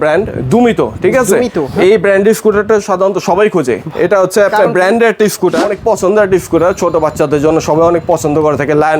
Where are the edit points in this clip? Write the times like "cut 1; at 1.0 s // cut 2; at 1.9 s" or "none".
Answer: cut 1; at 5.7 s